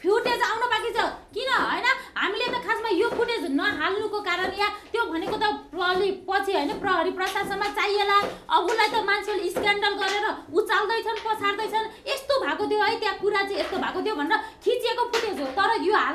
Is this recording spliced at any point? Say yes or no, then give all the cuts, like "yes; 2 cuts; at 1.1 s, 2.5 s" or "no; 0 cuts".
no; 0 cuts